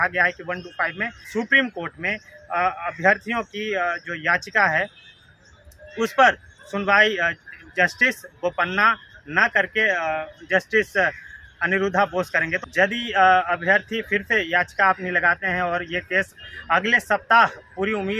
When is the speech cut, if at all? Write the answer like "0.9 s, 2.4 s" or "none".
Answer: 1.2 s, 12.5 s